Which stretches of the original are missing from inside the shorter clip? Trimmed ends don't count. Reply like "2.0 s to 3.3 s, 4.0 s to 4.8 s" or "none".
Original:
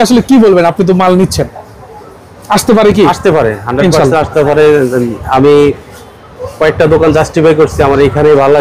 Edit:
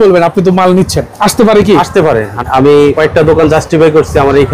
1.5 s to 2.3 s, 3.7 s to 5.2 s, 5.7 s to 6.6 s

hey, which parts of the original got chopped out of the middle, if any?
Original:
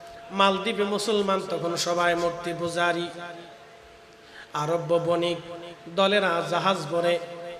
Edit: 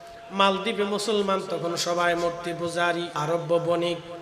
3.1 s to 4.5 s

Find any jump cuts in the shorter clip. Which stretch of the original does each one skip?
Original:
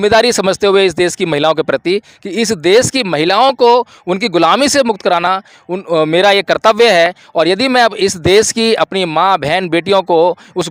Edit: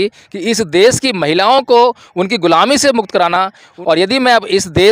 5.6 s to 7.2 s

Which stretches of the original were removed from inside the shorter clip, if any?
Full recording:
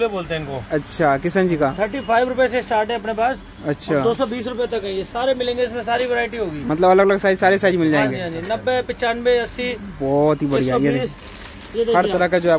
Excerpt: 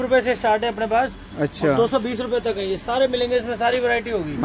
none

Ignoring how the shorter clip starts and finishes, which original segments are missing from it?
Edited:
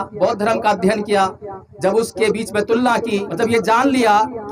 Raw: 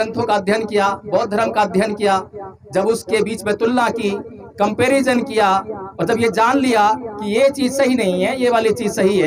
4.2 s to 6.0 s

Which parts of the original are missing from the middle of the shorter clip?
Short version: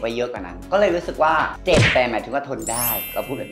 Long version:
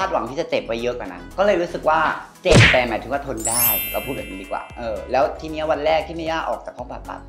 2.2 s to 2.3 s

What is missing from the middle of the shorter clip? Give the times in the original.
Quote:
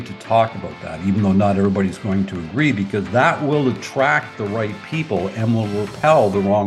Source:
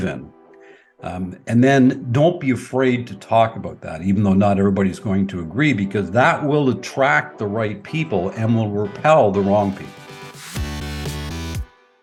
none

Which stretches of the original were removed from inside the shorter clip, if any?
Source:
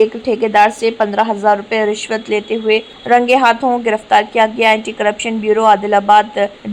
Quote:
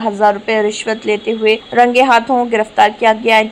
2.9 s to 3.0 s

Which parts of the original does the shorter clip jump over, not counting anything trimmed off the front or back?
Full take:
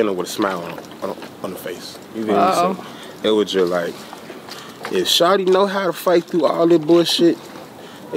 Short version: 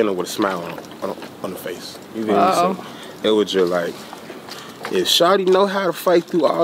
none

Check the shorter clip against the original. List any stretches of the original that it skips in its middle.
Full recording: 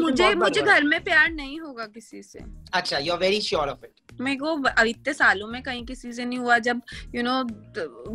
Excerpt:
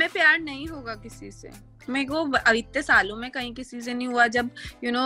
2.5 s to 3.9 s

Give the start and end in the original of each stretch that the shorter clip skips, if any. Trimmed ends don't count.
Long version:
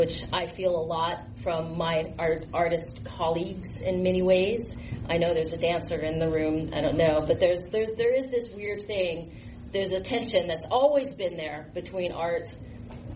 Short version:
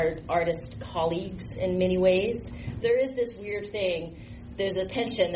5.0 s to 7.9 s

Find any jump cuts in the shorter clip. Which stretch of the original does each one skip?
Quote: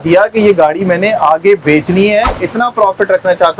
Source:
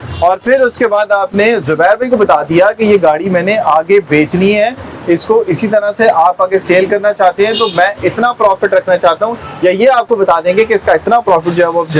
4.9 s to 8.0 s

